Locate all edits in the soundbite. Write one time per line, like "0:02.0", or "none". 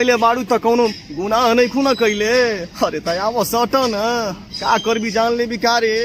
none